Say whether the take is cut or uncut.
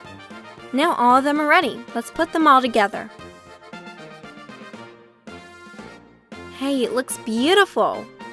cut